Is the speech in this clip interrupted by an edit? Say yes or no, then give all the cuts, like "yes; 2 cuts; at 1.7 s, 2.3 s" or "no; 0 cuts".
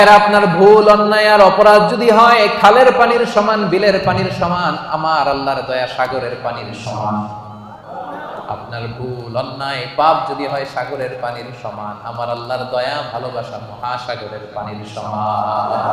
no; 0 cuts